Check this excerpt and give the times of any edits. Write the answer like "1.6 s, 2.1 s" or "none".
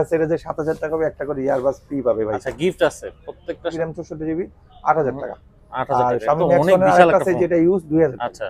3.7 s